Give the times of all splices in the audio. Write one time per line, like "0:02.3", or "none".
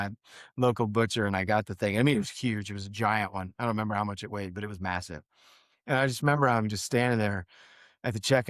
none